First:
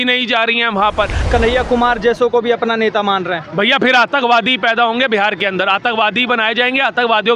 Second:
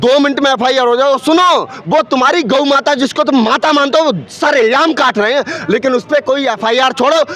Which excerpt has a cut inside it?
first; 1 cut; at 1.2 s

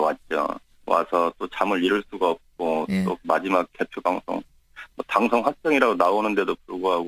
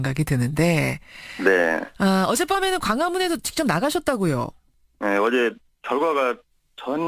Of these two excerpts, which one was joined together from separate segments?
second; 1 cut; at 5.7 s

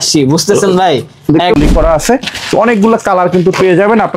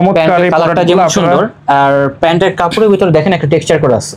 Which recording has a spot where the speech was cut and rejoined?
first; 1 cut; at 1.5 s

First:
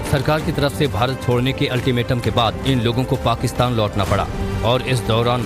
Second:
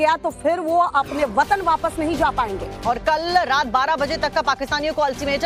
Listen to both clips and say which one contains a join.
first; 1 cut; at 4.2 s

